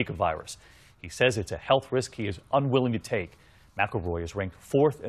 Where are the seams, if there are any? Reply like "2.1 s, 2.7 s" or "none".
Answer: 1.9 s